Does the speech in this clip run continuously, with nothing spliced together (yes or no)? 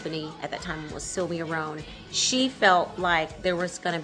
yes